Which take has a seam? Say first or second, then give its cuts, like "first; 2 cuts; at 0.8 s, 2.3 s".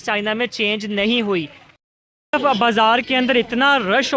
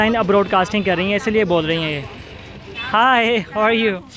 first; 1 cut; at 1.6 s